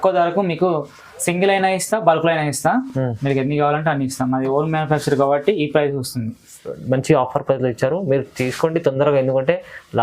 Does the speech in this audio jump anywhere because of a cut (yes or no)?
no